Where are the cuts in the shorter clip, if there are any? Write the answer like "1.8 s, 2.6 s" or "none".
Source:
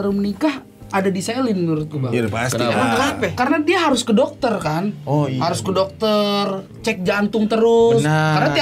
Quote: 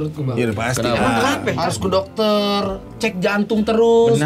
1.5 s